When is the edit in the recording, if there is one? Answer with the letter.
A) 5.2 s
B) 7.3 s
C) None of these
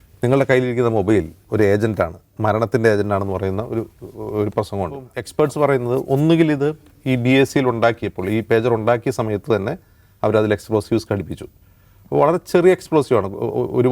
A